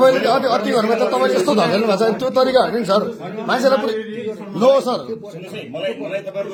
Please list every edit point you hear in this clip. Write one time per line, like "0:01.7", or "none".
none